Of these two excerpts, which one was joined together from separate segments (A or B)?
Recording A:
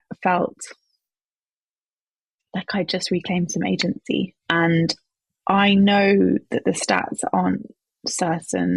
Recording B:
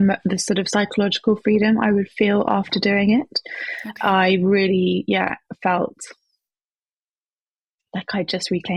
A